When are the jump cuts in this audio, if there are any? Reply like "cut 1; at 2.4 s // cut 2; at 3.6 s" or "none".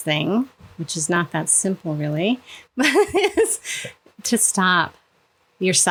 none